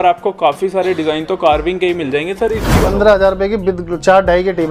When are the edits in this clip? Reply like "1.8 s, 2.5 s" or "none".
2.9 s